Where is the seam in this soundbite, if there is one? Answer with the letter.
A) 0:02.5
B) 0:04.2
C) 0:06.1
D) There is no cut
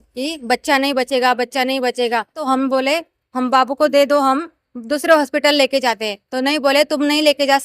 A